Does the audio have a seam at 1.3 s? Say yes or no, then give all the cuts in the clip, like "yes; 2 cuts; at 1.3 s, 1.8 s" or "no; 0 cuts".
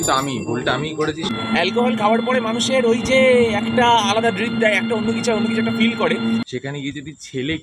yes; 2 cuts; at 1.3 s, 6.4 s